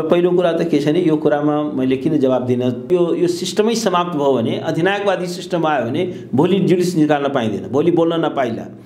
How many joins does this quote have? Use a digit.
1